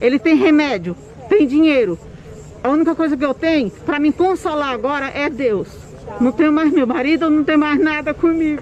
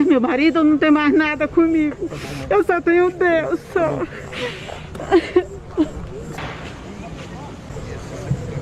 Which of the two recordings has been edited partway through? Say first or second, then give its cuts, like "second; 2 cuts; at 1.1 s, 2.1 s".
second; 1 cut; at 7.7 s